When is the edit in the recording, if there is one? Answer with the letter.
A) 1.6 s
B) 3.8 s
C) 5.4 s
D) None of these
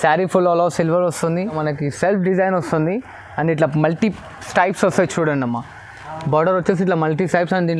A